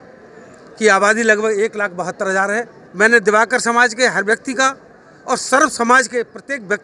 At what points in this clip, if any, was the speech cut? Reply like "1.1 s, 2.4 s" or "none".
2.8 s